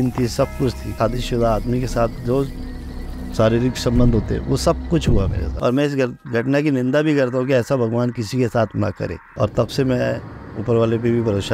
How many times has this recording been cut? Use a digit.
3